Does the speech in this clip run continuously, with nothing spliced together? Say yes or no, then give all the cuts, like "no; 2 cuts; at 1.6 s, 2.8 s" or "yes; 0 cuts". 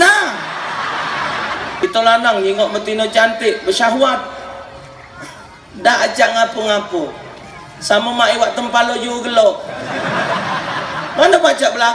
no; 1 cut; at 1.8 s